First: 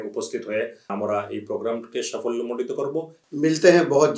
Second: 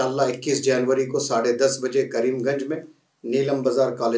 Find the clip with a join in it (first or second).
first